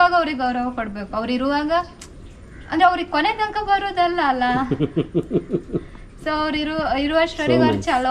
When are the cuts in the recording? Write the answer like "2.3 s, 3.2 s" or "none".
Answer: none